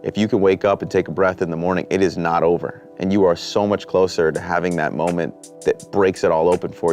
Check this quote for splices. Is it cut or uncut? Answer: cut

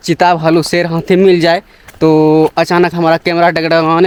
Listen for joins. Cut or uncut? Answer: uncut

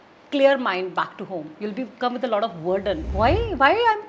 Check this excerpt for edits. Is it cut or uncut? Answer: cut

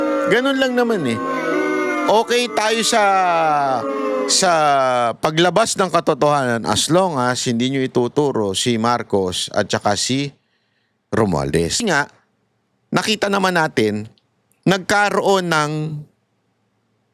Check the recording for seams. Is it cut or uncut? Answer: cut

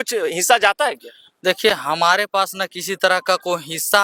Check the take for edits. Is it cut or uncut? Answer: uncut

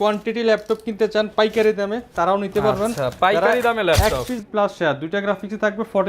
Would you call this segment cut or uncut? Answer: cut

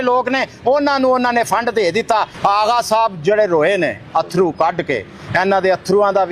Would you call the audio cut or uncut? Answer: cut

